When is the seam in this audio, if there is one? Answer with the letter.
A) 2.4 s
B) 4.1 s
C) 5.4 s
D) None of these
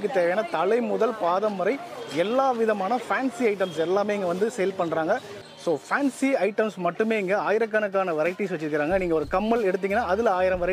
C